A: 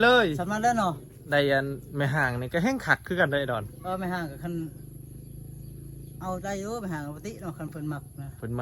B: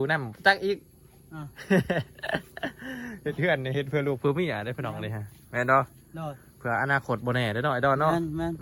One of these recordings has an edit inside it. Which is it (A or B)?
A